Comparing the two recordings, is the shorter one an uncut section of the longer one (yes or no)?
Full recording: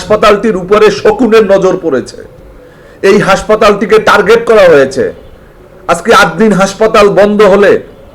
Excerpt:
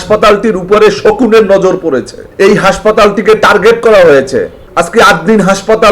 no